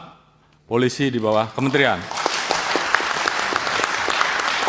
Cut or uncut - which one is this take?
uncut